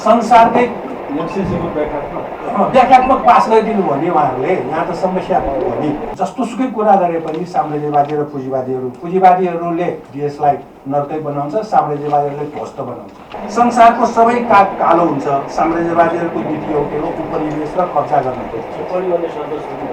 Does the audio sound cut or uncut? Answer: cut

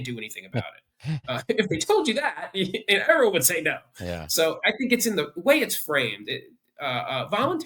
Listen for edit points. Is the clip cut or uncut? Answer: uncut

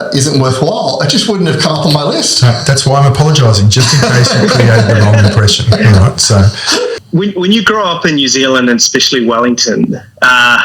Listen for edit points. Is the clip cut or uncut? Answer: cut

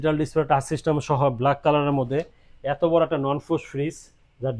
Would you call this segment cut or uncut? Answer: uncut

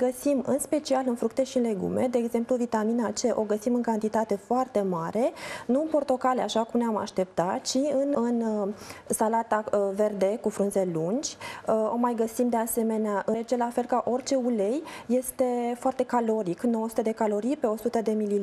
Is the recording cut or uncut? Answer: uncut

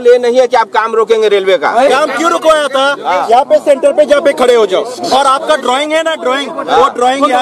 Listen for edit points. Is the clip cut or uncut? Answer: uncut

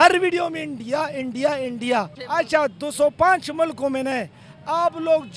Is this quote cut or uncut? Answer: cut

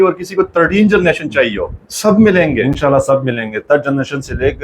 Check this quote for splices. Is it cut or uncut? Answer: uncut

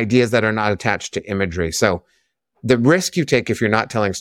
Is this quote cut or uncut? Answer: uncut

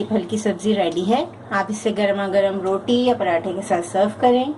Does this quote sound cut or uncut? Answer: uncut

